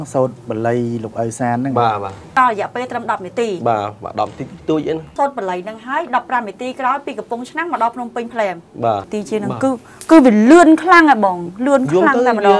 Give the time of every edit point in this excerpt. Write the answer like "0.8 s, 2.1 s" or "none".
2.3 s, 5.1 s, 9.1 s